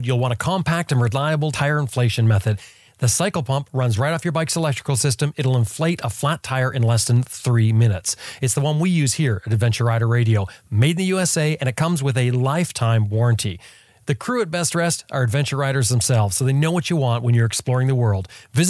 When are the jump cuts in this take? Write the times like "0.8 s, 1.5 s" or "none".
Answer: none